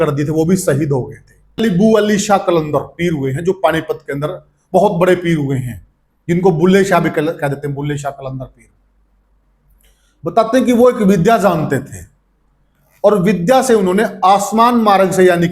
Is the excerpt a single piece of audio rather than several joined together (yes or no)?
no